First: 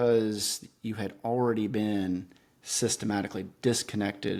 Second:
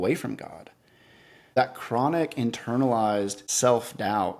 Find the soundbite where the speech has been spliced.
second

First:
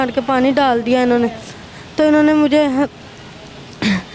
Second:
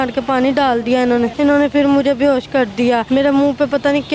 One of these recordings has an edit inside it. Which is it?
second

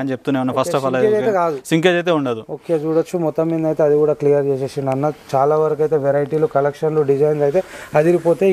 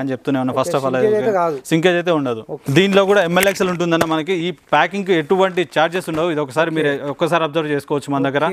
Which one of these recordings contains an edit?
second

